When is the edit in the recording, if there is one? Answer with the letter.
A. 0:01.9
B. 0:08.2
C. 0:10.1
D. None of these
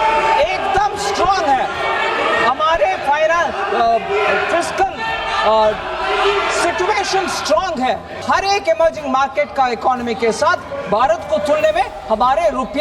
B